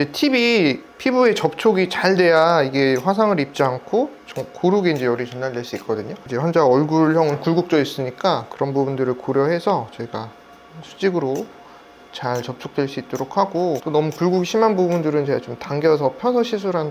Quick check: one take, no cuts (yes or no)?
yes